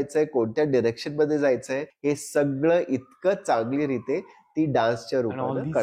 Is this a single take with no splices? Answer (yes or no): no